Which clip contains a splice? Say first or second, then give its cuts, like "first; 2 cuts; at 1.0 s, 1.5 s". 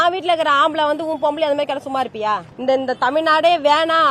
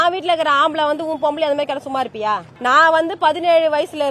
first; 1 cut; at 2.5 s